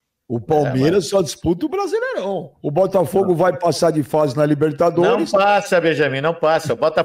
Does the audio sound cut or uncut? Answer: uncut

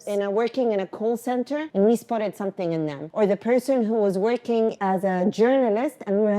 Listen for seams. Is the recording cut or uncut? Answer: cut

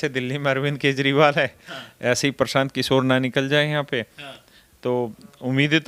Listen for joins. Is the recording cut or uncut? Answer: uncut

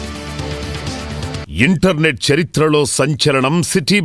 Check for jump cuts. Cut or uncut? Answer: cut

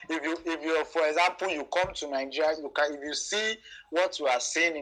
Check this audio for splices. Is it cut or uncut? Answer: uncut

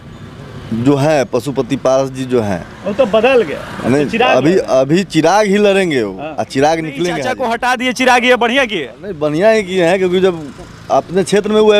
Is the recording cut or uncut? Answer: cut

